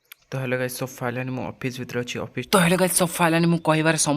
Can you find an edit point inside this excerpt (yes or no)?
yes